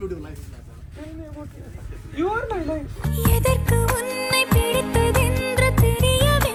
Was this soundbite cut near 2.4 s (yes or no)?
no